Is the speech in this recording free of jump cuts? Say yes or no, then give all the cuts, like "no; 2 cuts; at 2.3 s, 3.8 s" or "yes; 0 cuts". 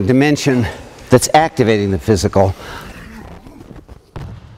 no; 1 cut; at 2.9 s